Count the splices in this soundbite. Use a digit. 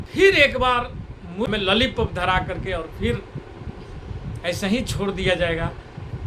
1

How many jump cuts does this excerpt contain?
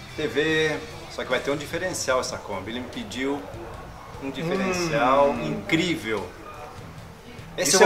1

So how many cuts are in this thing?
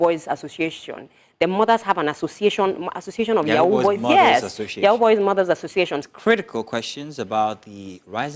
1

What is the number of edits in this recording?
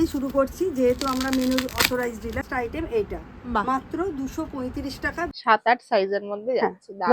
2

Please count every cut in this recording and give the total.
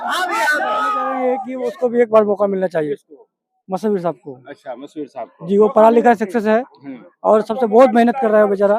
1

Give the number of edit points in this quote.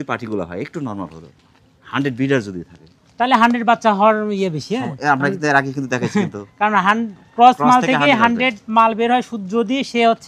0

